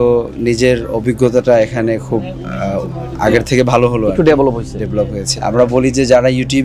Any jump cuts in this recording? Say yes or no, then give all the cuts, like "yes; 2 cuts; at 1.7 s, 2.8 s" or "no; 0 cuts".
yes; 1 cut; at 5.2 s